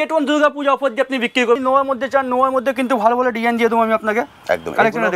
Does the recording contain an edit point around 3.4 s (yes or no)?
no